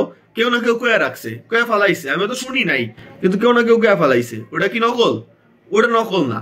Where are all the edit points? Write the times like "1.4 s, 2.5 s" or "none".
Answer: none